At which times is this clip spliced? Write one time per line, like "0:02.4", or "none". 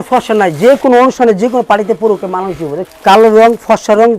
0:02.9